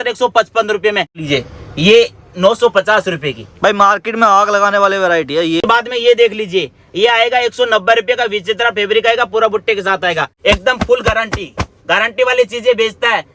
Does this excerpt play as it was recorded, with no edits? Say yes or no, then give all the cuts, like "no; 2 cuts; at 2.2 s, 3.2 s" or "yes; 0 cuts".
no; 3 cuts; at 1.2 s, 5.7 s, 10.3 s